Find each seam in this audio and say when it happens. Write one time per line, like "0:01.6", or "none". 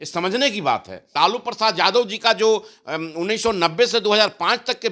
0:01.1